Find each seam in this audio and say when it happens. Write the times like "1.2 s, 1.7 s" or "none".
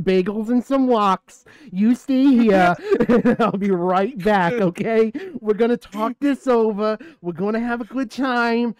none